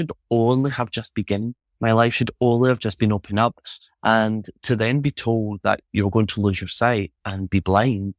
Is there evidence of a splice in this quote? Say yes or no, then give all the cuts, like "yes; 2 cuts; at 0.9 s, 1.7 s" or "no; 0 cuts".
no; 0 cuts